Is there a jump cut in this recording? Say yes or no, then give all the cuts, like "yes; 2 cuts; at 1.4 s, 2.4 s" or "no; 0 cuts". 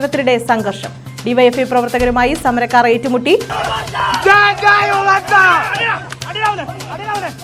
no; 0 cuts